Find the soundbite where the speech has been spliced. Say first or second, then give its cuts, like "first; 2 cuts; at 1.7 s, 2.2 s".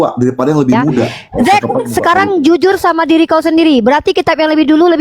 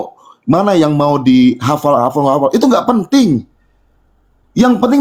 first; 1 cut; at 1.1 s